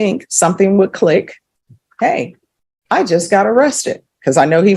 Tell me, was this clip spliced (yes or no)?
no